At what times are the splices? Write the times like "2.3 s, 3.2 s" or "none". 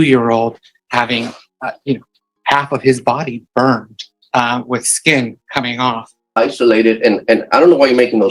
1.4 s, 6.3 s

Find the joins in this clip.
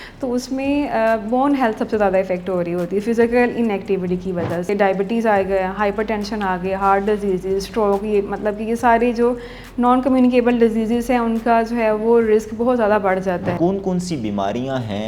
4.7 s, 13.5 s

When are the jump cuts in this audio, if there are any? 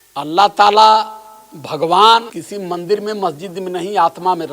2.4 s

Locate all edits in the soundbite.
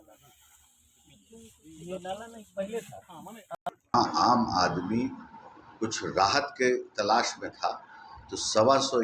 3.9 s

